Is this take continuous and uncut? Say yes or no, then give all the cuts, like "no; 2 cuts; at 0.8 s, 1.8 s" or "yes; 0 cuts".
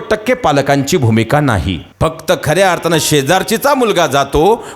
no; 1 cut; at 1.8 s